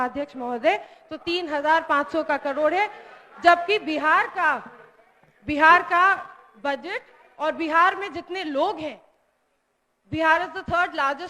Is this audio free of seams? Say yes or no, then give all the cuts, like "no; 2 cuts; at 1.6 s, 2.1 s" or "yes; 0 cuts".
yes; 0 cuts